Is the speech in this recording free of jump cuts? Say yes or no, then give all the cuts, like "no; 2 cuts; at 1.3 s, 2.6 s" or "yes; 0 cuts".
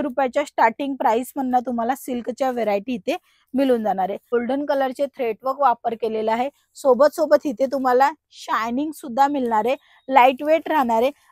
no; 1 cut; at 4.3 s